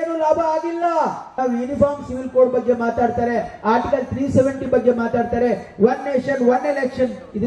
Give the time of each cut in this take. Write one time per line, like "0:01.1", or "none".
0:01.2